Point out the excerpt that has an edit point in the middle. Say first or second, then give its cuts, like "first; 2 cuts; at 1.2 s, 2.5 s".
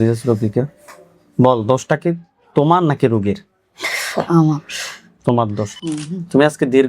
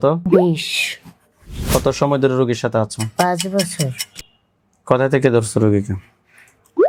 first; 1 cut; at 5.6 s